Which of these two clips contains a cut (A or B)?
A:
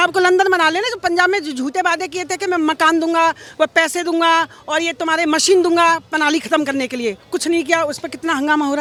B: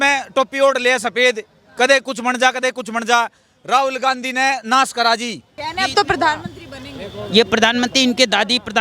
B